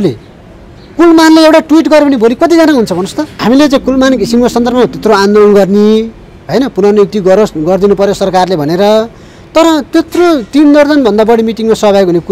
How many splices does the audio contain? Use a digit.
1